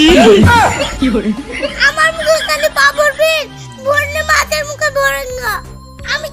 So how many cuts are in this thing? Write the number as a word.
zero